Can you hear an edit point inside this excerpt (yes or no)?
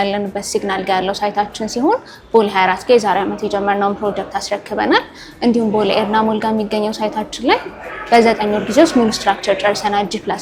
no